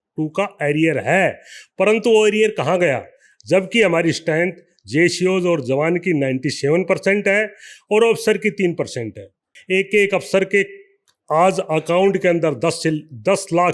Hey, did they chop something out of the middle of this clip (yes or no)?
yes